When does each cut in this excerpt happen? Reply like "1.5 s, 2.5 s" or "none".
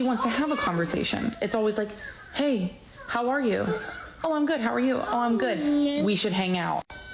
1.5 s